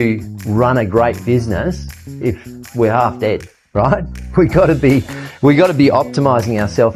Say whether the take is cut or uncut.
uncut